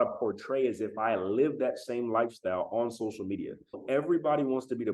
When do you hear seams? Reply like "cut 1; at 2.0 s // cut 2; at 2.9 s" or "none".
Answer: cut 1; at 3.8 s